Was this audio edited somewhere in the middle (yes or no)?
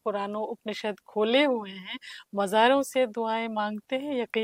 no